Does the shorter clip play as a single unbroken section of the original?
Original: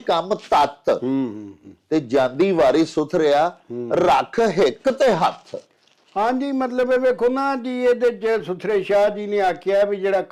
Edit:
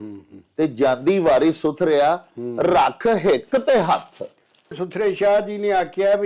no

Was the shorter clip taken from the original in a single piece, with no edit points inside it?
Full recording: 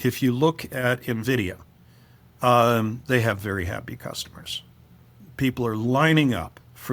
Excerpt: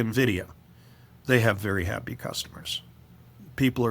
no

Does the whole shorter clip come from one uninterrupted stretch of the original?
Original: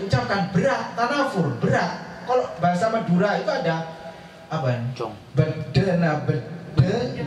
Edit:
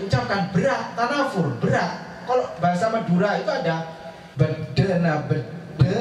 no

